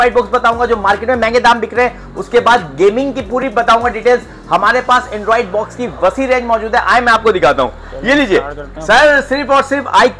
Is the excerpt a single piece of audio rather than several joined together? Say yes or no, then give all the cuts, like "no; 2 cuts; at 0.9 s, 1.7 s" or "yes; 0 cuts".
yes; 0 cuts